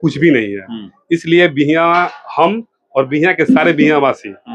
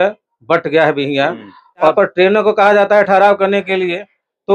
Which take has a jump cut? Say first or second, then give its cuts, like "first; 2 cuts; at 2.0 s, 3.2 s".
second; 1 cut; at 1.9 s